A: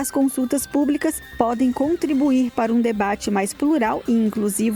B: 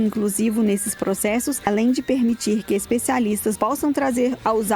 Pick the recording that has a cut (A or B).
B